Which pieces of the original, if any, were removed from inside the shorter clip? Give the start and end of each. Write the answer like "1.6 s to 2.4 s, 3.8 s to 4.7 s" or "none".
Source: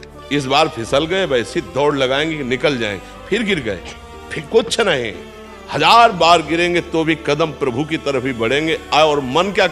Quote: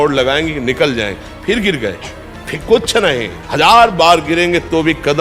5.2 s to 5.6 s